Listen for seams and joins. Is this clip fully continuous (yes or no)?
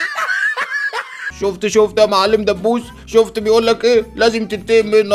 no